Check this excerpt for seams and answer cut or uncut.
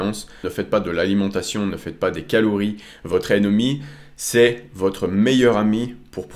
uncut